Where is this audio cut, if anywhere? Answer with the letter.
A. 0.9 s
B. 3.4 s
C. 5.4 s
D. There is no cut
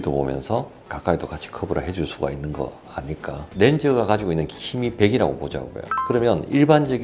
B